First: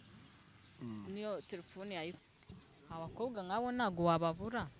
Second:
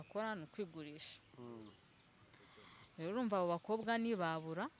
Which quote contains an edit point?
first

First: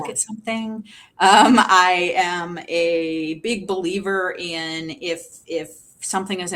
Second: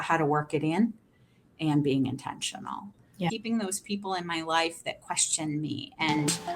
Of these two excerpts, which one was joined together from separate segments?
second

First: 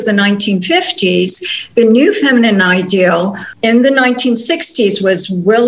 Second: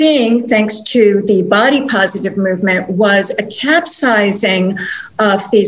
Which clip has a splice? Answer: first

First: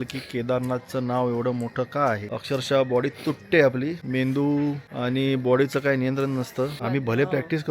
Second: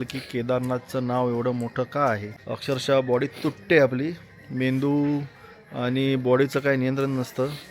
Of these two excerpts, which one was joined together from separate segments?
first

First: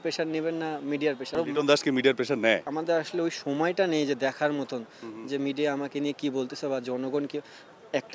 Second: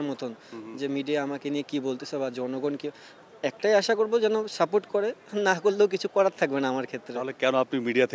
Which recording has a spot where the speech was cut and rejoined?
first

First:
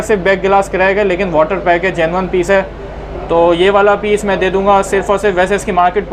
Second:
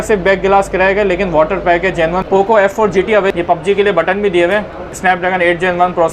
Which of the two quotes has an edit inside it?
second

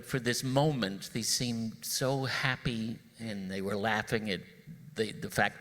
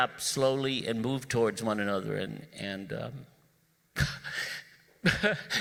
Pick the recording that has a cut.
first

